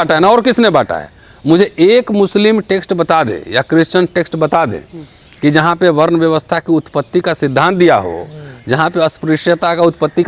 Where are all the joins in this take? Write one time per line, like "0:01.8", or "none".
none